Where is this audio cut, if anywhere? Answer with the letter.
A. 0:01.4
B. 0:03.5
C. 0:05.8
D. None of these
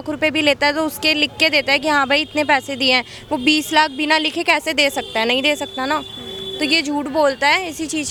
D